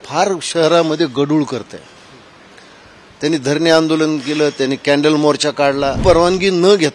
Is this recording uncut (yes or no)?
no